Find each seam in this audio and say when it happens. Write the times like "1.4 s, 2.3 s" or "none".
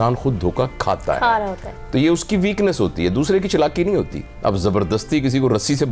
4.2 s

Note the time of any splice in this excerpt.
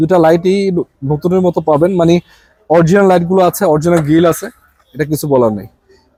none

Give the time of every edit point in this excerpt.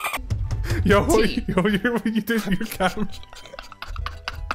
none

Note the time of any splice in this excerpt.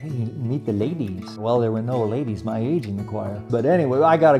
1.4 s, 3.5 s

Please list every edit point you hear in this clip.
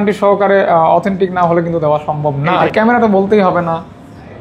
2.6 s

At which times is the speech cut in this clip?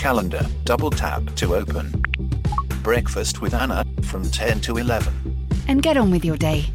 none

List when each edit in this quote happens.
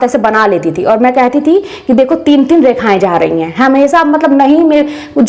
none

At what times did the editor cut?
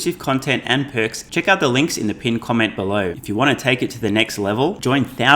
1.2 s, 3.2 s

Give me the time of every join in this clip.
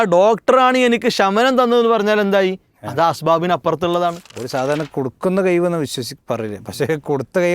4.3 s

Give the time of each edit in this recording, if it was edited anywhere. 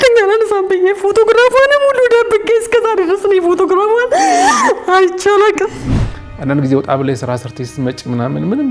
5.8 s

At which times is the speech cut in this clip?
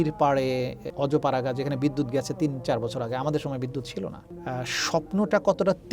0.8 s, 4.3 s

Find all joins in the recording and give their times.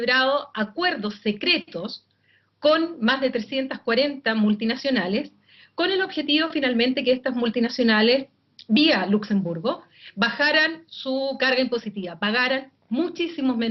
none

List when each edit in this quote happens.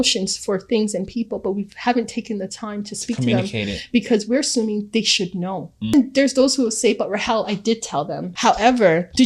5.9 s, 8.2 s

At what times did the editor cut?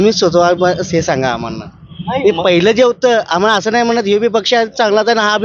none

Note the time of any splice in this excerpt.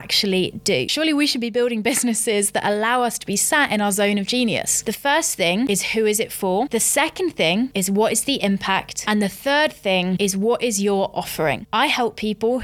0.9 s, 4.8 s, 5.7 s, 6.7 s, 8.9 s, 10.2 s, 11.6 s

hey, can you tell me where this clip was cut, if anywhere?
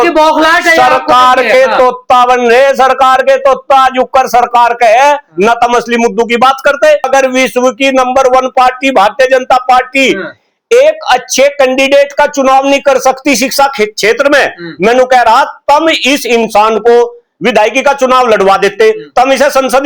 7.1 s

